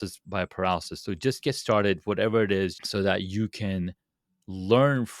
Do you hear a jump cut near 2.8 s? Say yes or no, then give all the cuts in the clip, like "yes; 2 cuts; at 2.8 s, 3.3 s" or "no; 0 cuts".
yes; 1 cut; at 2.8 s